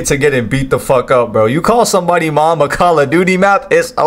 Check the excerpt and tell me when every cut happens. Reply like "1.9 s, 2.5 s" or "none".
none

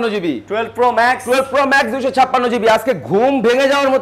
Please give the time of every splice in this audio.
none

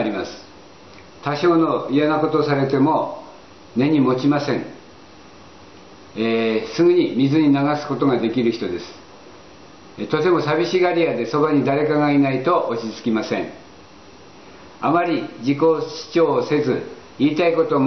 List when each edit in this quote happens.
3.9 s

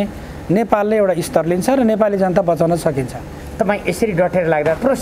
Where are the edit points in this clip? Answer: none

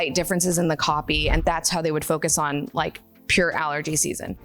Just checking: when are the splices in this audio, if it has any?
1.4 s

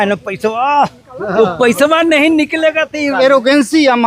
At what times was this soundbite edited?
3.1 s

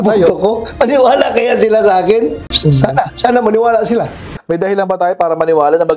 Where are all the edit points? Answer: 2.5 s, 4.3 s

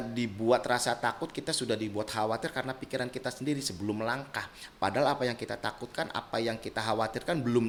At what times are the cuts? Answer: none

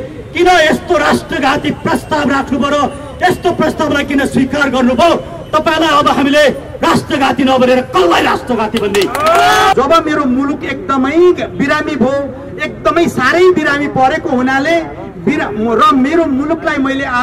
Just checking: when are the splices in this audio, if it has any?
9.7 s

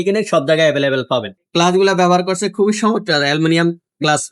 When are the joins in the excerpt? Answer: 1.4 s

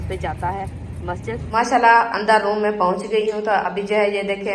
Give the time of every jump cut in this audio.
1.5 s

